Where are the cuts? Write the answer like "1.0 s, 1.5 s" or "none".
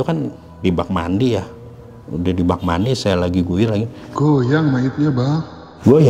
none